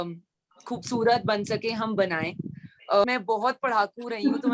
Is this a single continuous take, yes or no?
no